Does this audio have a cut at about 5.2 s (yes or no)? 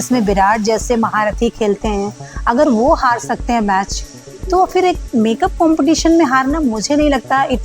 no